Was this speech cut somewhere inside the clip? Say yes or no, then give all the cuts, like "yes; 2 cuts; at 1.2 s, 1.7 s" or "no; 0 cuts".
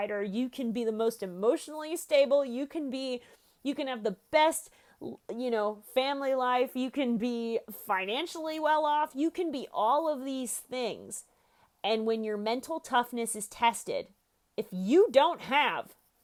no; 0 cuts